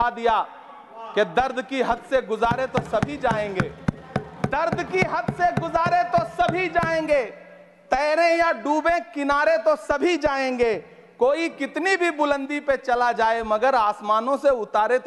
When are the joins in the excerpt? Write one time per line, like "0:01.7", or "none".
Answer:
none